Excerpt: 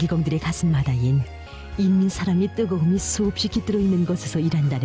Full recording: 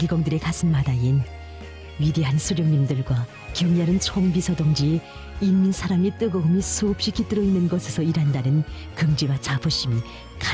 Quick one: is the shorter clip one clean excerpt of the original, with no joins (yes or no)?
no